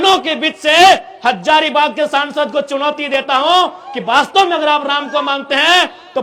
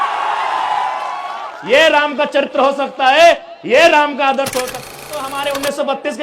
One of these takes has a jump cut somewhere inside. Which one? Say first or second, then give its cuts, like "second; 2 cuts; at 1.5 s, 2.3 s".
second; 1 cut; at 4.8 s